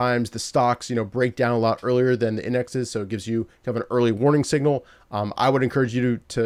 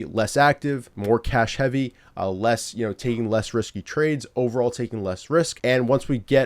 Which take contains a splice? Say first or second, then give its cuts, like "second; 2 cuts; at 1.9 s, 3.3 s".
second; 2 cuts; at 0.9 s, 5.5 s